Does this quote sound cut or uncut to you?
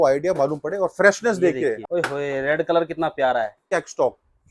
cut